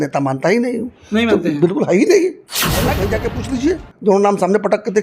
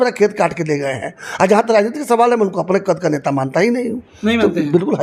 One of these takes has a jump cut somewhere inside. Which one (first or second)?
first